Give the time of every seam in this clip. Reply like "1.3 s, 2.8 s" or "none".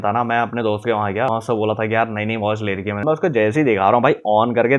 1.3 s, 3.0 s